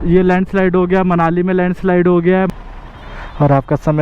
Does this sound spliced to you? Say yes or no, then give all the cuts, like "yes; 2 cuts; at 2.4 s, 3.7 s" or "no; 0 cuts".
yes; 1 cut; at 2.5 s